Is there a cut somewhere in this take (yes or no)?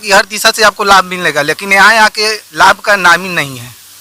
no